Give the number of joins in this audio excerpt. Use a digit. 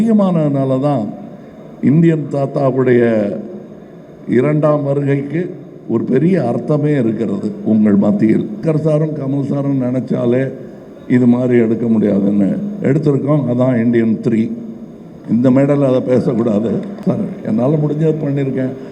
2